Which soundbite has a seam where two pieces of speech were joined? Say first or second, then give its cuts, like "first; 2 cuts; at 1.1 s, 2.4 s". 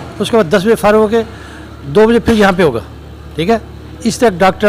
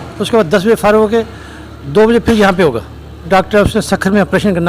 second; 1 cut; at 3.3 s